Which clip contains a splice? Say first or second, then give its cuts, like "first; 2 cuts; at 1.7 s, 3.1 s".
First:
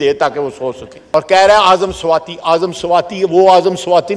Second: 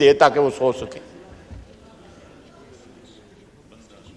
first; 1 cut; at 0.9 s